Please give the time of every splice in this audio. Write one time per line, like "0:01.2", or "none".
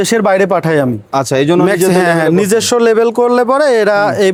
none